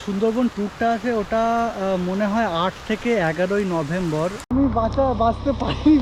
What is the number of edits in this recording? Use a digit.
1